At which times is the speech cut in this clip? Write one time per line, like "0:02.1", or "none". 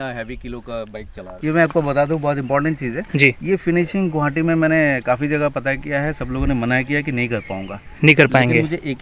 0:01.3